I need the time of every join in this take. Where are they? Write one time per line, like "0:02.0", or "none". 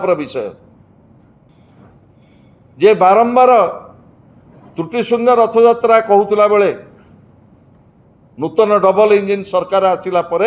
0:01.5